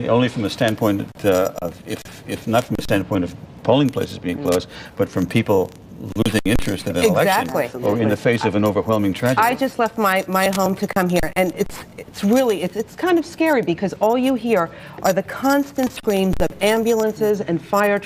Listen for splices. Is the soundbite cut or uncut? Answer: uncut